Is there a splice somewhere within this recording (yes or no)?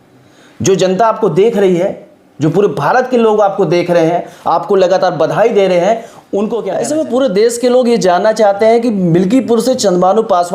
yes